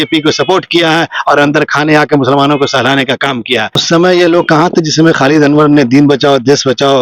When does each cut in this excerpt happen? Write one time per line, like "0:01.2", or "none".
0:03.8